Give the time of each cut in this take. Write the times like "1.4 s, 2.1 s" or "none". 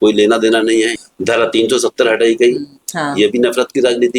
1.0 s, 2.8 s